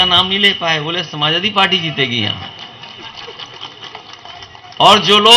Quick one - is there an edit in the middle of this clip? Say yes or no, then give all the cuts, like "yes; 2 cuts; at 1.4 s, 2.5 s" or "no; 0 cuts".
no; 0 cuts